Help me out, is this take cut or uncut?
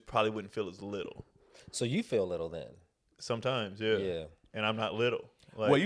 uncut